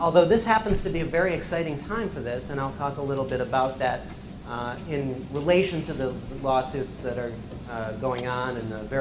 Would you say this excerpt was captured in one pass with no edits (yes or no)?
yes